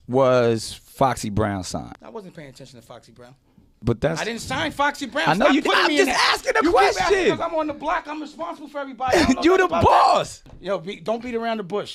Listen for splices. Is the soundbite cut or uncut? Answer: cut